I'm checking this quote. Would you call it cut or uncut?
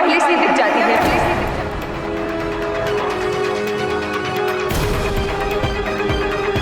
uncut